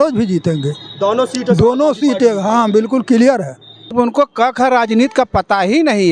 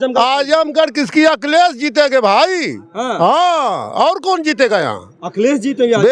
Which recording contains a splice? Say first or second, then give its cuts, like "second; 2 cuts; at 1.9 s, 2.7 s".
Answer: first; 1 cut; at 3.9 s